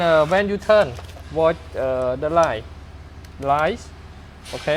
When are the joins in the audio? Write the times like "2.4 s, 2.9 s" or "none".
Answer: none